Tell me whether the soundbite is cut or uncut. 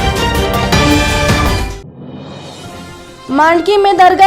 uncut